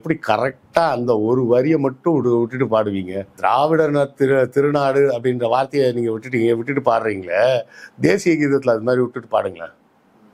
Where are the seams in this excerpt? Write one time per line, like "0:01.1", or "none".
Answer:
0:03.3

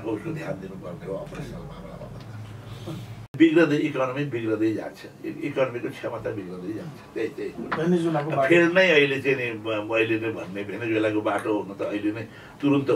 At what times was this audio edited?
0:03.2

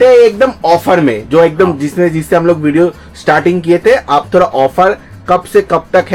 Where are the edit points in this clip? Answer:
none

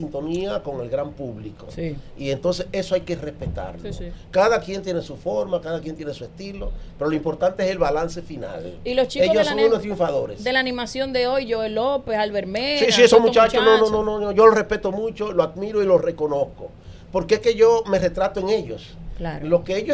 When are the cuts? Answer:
none

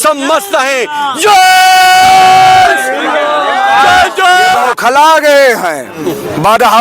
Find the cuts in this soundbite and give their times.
0:04.7

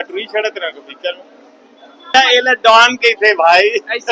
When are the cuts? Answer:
0:02.1

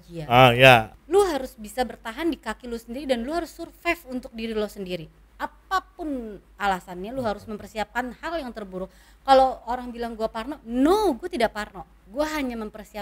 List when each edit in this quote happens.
0:00.9

